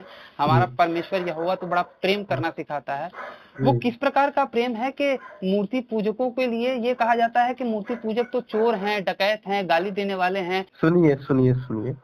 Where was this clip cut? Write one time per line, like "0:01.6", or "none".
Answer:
0:10.7

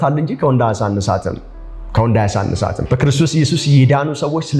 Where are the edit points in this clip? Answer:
0:02.8

